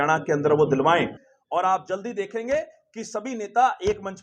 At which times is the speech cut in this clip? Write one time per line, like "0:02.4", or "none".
0:01.2